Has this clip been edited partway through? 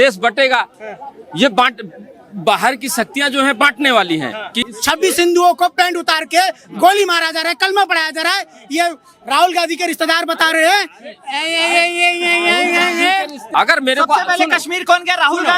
yes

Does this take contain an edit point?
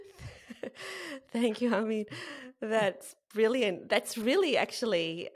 yes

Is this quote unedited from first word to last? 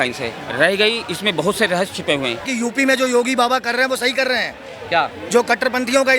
no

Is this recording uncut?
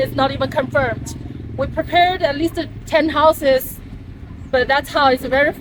yes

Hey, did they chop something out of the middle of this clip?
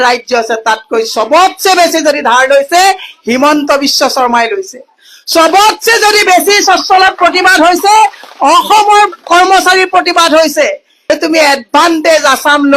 yes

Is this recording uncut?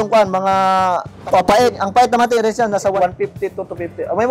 no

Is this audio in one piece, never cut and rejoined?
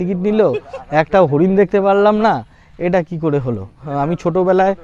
no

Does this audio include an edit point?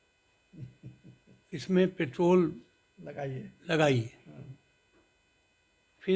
no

